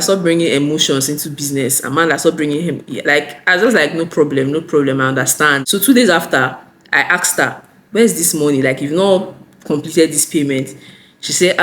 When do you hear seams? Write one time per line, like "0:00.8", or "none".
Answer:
0:05.6